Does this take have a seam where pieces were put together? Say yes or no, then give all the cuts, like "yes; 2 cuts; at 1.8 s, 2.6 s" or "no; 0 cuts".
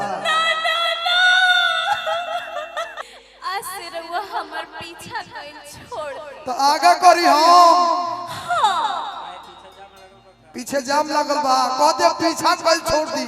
yes; 1 cut; at 3.0 s